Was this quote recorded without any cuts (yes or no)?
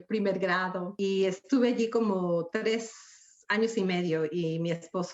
no